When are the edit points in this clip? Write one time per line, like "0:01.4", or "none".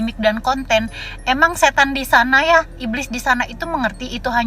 none